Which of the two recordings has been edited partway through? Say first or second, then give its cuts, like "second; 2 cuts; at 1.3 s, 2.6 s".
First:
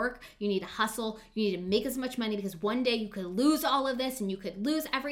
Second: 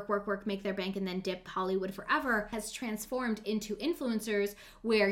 second; 1 cut; at 2.5 s